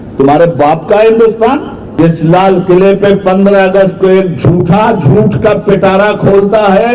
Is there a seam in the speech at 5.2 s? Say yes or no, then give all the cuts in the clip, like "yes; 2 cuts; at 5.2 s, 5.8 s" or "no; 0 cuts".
no; 1 cut; at 2.0 s